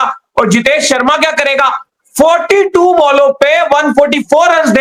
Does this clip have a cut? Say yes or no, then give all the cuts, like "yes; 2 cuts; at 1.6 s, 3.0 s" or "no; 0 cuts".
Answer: no; 0 cuts